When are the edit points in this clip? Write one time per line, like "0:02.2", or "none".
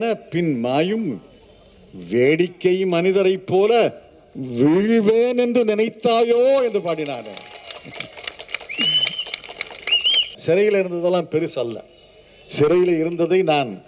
0:10.4

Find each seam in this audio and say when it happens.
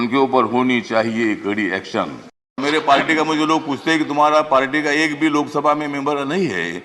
0:02.6

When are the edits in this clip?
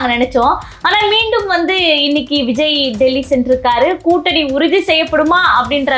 none

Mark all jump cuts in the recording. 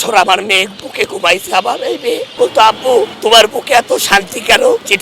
0:02.3

